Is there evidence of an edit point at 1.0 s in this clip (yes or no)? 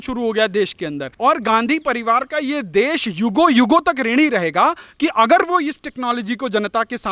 yes